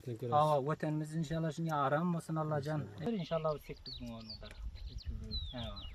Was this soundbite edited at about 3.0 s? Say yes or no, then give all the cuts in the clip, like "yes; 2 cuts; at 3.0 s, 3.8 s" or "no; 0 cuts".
yes; 1 cut; at 3.0 s